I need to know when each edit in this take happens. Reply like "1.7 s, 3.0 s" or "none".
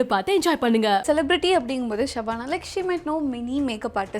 1.0 s